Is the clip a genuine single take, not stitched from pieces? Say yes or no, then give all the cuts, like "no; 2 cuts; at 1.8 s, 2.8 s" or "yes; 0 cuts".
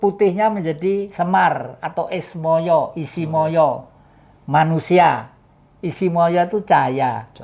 yes; 0 cuts